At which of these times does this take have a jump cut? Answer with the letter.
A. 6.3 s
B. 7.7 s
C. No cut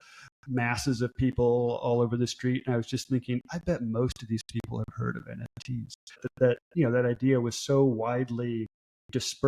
A